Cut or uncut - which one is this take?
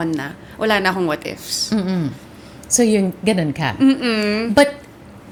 uncut